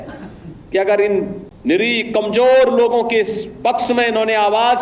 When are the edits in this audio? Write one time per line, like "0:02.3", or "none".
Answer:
0:01.4

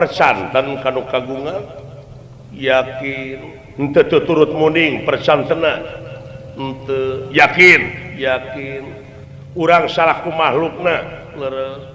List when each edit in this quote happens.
none

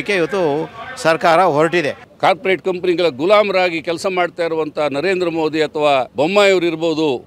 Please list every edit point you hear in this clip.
0:02.0
0:06.1

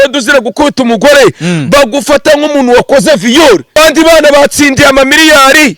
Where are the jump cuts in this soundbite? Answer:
0:03.8

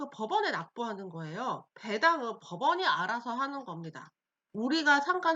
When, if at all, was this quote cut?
0:01.7

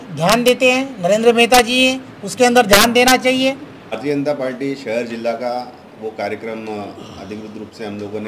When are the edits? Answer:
0:04.0

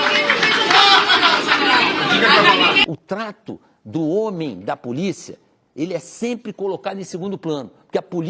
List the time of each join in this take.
0:02.8

